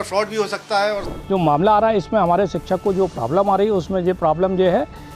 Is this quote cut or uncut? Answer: cut